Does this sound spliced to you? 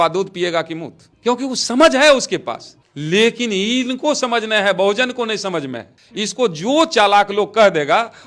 no; 0 cuts

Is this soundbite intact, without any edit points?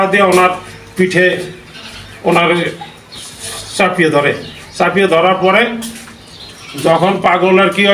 yes; 0 cuts

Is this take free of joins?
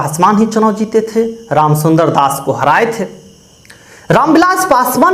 yes; 0 cuts

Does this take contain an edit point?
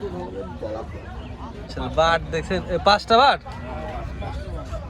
yes; 1 cut; at 1.7 s

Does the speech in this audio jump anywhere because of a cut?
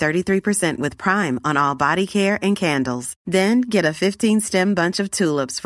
no; 0 cuts

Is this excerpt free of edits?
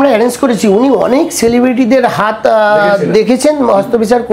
yes; 0 cuts

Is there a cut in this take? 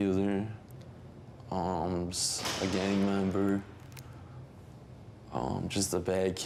no; 0 cuts

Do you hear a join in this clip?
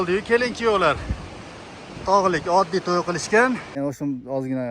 yes; 1 cut; at 3.8 s

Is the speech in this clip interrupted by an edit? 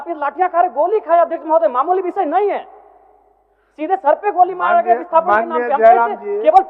no; 0 cuts

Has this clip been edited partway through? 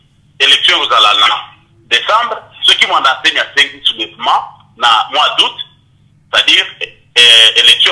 no; 0 cuts

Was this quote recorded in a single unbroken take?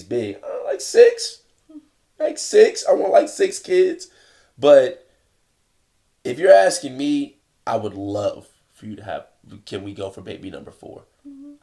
yes; 0 cuts

